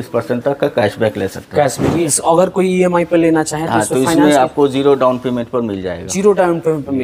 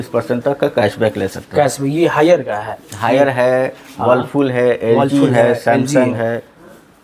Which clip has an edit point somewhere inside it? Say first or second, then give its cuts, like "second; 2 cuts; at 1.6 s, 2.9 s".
first; 1 cut; at 2.1 s